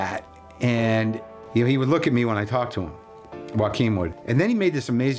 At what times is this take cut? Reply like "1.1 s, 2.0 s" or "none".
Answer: 1.4 s, 4.2 s